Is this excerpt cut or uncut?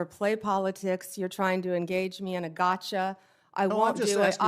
uncut